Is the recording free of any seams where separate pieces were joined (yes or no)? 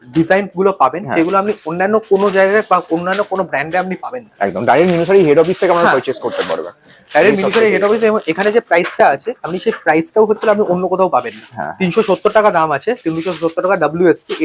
yes